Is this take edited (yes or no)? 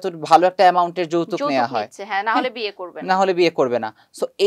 no